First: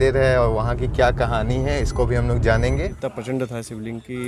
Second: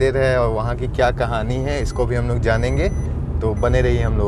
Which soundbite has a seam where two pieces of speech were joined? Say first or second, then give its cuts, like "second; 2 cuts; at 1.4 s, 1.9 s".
first; 1 cut; at 2.9 s